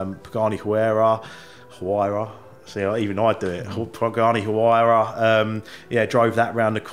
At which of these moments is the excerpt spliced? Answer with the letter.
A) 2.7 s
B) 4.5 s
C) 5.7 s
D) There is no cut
D